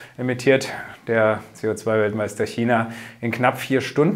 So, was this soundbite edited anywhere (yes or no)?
no